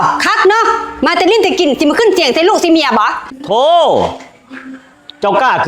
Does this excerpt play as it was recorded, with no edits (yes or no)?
no